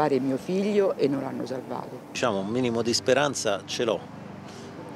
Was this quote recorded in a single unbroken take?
no; 1 cut; at 2.1 s

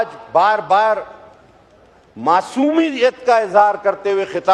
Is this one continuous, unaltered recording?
yes; 0 cuts

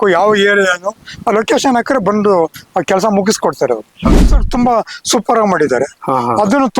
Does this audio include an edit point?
yes; 1 cut; at 4.1 s

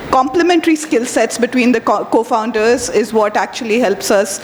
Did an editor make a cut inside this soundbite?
no; 0 cuts

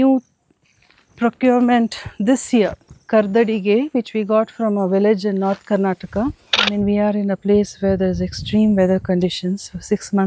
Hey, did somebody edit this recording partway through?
yes; 1 cut; at 6.6 s

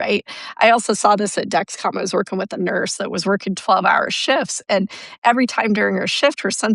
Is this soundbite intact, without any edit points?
yes; 0 cuts

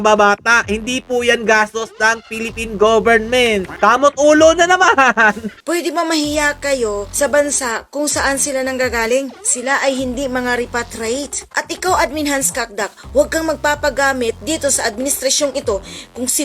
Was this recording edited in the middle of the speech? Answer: yes; 3 cuts; at 3.7 s, 5.5 s, 11.5 s

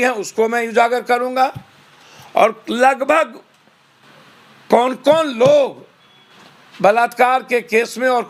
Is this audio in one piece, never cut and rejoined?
yes; 0 cuts

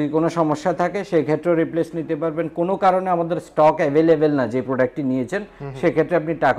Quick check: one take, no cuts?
yes; 0 cuts

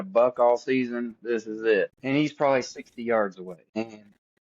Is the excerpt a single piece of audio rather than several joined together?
no; 2 cuts; at 2.0 s, 3.7 s

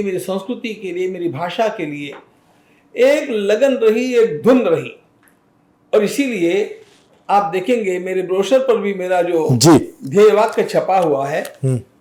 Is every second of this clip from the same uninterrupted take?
yes; 0 cuts

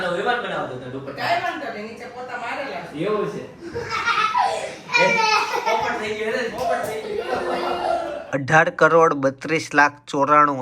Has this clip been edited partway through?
yes; 1 cut; at 8.2 s

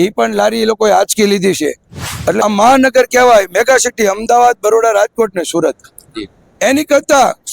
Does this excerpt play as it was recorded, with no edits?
no; 1 cut; at 2.4 s

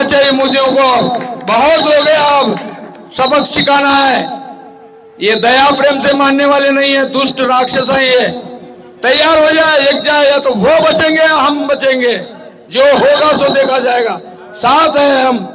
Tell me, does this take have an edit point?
no; 0 cuts

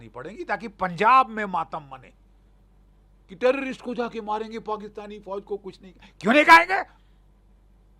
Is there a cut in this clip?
no; 0 cuts

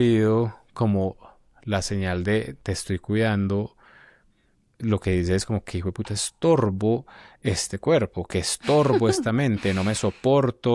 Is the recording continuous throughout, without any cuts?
yes; 0 cuts

